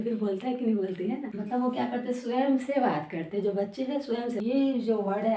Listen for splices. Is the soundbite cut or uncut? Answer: cut